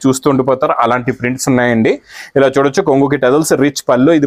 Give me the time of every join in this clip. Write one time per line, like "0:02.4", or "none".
none